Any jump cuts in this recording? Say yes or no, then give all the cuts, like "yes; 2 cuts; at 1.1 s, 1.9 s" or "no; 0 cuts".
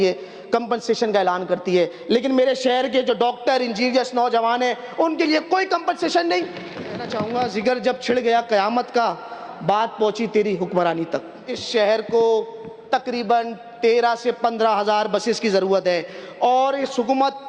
yes; 2 cuts; at 7.2 s, 11.5 s